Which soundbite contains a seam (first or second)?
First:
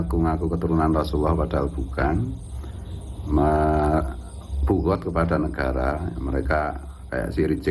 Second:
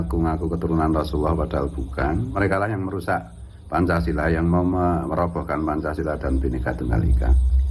second